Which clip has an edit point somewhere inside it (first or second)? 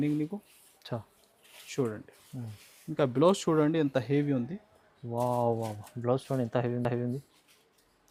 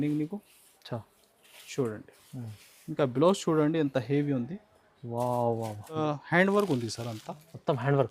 second